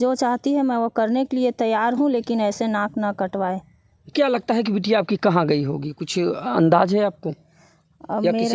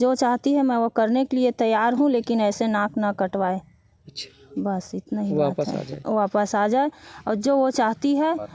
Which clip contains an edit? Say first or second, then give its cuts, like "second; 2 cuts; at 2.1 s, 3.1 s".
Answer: first; 1 cut; at 4.1 s